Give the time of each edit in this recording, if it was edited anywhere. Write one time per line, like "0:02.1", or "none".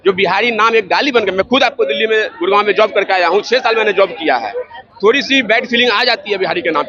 none